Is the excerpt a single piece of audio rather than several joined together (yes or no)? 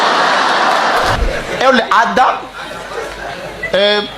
no